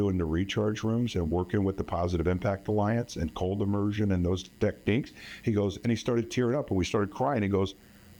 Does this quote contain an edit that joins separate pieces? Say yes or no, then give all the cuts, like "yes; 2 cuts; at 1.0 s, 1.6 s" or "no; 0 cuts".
no; 0 cuts